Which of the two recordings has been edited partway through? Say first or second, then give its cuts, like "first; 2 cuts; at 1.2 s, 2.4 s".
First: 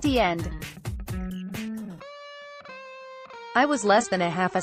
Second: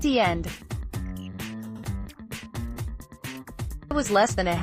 second; 2 cuts; at 1.1 s, 3.9 s